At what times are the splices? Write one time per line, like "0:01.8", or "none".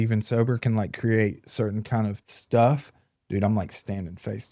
0:02.3

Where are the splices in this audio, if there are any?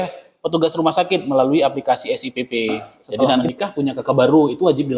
0:03.4

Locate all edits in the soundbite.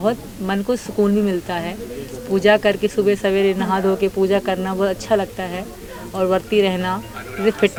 none

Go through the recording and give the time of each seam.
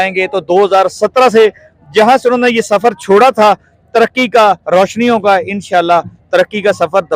none

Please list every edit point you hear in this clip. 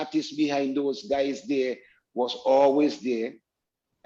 none

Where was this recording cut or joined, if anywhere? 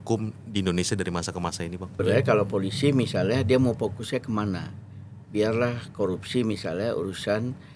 0:01.9

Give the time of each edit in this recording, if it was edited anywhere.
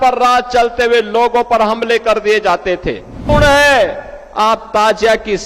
0:03.2

